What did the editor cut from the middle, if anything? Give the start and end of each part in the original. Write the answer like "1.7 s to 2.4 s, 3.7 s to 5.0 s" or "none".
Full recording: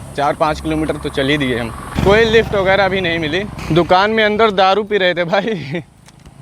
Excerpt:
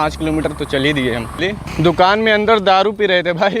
1.8 s to 3.3 s